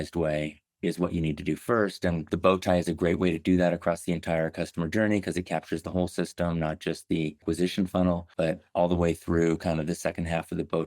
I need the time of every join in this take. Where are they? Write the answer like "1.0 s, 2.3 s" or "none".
2.3 s, 7.4 s, 8.3 s